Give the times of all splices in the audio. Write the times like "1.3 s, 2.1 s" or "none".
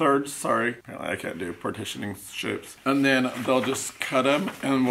none